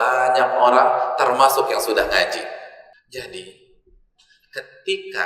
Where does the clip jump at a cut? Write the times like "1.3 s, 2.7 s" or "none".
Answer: 2.9 s

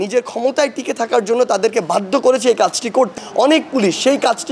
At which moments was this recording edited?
3.2 s

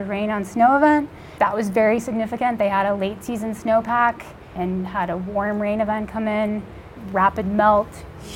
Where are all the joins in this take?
1.2 s, 4.5 s, 6.9 s

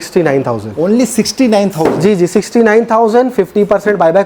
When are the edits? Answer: none

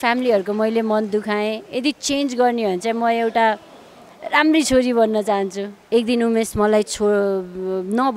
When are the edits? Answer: 5.7 s

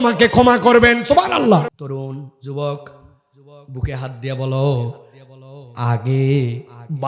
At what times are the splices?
1.7 s

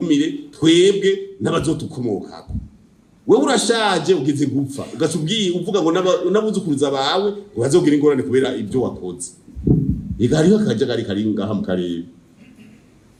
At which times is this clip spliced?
none

